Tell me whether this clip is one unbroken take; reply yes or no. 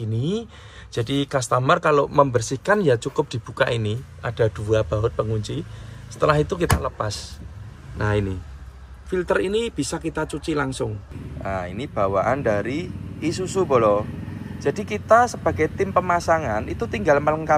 no